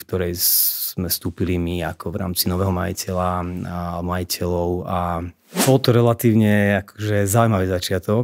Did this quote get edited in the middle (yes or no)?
yes